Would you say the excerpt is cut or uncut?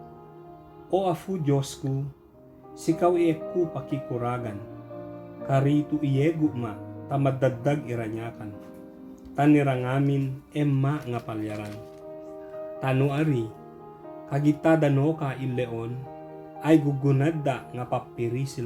uncut